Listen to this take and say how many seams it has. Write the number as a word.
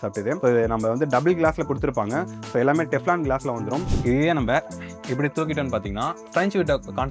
one